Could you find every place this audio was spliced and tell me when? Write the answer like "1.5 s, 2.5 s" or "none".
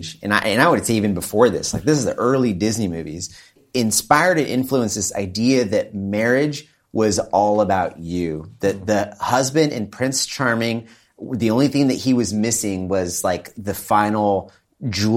3.6 s